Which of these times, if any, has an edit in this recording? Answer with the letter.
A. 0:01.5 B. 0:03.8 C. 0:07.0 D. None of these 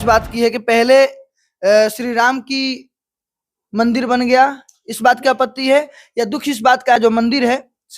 C